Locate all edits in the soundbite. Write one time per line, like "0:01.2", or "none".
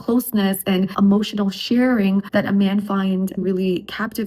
0:00.9